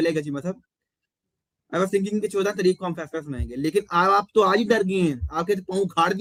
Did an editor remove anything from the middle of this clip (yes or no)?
no